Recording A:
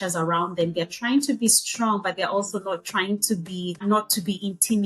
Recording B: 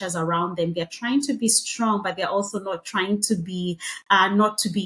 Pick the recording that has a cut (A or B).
A